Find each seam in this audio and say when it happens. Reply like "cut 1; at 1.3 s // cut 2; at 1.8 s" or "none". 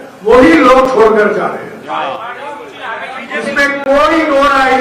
none